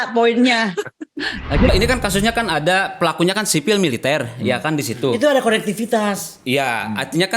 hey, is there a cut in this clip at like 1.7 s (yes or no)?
yes